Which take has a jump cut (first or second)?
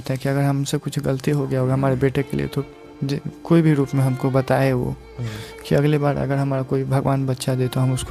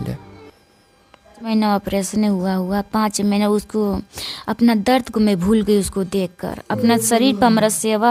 second